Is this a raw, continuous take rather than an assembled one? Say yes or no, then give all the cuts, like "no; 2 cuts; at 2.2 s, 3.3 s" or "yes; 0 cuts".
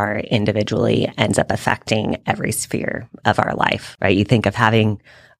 no; 1 cut; at 3.9 s